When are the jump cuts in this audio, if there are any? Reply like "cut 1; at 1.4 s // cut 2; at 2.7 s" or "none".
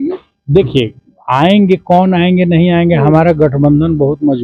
none